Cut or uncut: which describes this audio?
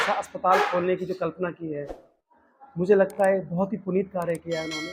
uncut